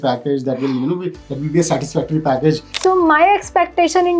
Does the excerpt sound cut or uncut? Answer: cut